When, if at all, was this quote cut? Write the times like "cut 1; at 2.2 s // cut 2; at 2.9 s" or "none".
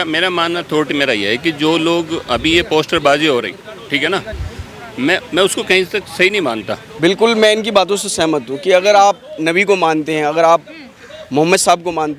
cut 1; at 6.8 s